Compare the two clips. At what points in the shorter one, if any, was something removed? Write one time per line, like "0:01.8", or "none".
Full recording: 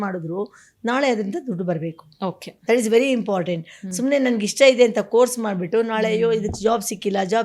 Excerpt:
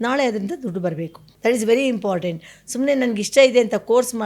0:01.2